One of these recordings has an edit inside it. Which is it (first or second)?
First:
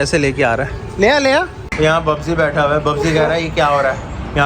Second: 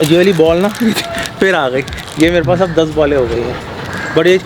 first